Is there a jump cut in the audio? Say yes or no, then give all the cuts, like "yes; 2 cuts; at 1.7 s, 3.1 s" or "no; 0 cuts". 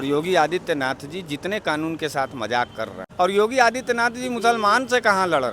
yes; 1 cut; at 3.1 s